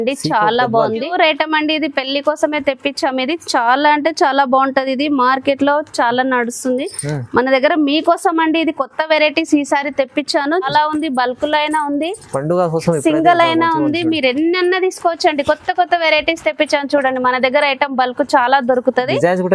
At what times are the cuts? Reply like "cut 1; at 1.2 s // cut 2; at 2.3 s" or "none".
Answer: cut 1; at 1.1 s // cut 2; at 10.7 s